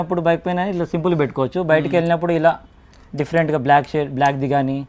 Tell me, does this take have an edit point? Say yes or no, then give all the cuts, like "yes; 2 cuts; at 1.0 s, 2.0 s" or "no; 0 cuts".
no; 0 cuts